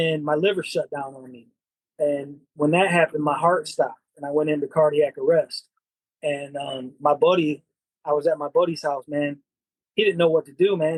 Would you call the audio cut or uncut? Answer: uncut